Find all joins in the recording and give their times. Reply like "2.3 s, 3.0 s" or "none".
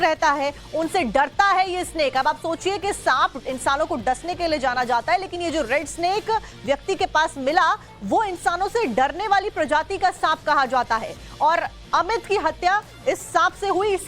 10.6 s